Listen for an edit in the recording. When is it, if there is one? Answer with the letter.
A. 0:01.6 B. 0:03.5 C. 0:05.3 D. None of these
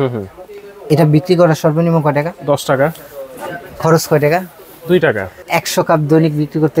C